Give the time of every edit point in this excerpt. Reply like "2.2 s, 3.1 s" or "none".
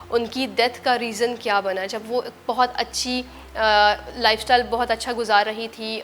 none